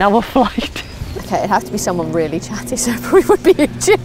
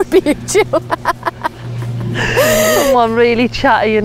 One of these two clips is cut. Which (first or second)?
first